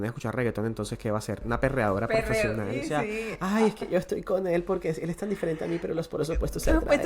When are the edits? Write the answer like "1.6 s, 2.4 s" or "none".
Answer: 1.4 s, 2.8 s